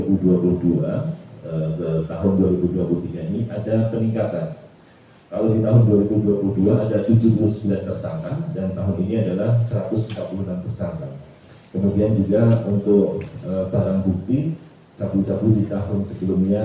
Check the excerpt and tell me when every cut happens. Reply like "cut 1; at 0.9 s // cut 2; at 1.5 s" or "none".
none